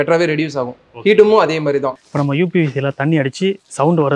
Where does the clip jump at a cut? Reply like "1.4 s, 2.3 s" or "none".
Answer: 2.0 s